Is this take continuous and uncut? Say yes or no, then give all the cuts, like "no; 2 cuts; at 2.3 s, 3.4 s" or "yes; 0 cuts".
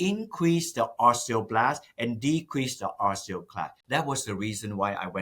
no; 1 cut; at 3.8 s